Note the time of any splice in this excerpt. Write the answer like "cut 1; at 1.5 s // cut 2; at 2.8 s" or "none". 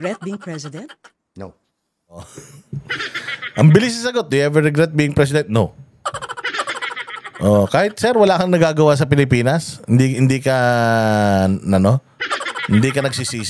none